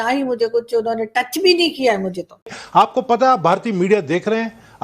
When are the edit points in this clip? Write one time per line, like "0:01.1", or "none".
0:02.6